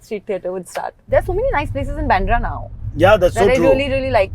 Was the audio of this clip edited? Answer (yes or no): yes